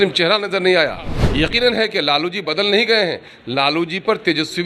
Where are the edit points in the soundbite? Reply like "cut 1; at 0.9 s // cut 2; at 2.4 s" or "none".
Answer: cut 1; at 1.2 s